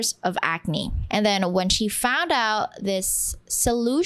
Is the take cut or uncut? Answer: cut